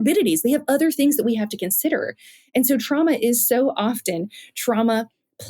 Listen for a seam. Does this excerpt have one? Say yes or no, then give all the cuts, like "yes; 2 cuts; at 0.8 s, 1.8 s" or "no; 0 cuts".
no; 0 cuts